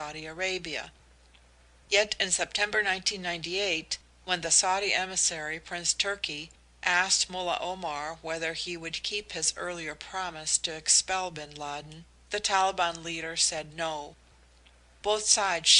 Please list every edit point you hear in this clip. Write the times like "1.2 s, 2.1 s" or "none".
2.8 s